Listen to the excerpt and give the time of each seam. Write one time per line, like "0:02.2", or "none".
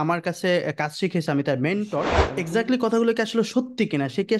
0:02.2